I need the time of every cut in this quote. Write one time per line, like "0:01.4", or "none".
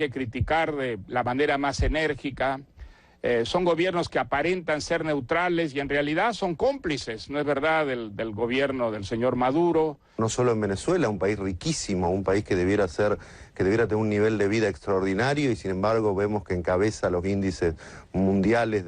0:10.2

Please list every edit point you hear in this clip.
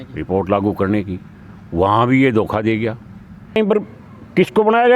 0:03.6

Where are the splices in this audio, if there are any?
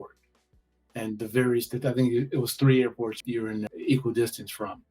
0:03.5

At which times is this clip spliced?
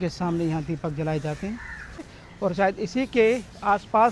0:02.2

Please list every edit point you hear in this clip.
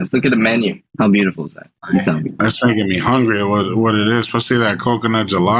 0:00.8
0:02.4

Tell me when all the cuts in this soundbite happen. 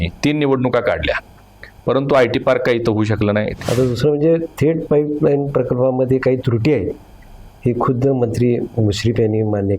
0:03.5

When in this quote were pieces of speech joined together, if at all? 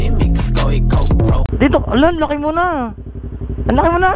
0:01.5
0:03.0

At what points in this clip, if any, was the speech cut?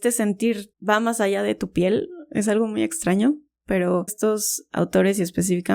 0:04.1

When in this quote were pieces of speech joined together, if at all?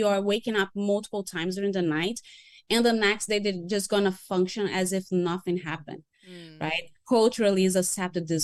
none

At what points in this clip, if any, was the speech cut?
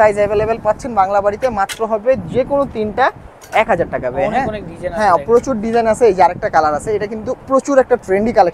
none

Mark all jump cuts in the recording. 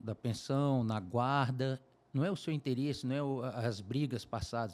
0:01.9

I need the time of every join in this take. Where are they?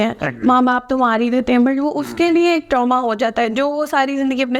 none

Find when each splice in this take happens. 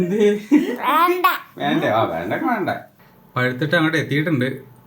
0:02.9

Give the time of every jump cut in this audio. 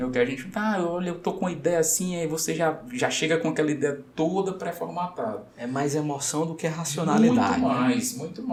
none

